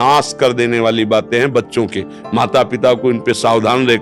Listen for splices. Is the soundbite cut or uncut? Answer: uncut